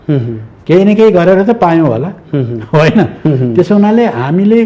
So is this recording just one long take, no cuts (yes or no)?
yes